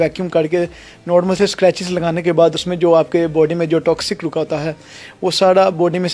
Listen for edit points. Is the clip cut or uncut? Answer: uncut